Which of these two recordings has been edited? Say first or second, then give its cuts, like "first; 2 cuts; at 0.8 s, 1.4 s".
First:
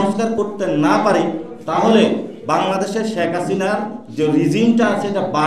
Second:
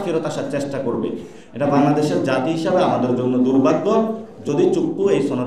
second; 1 cut; at 1.3 s